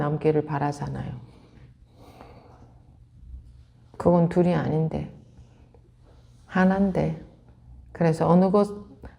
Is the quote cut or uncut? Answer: cut